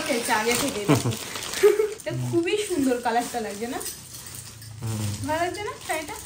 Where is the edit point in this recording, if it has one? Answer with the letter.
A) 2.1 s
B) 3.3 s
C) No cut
A